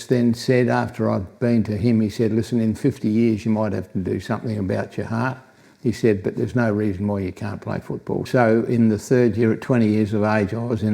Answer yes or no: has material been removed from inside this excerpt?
yes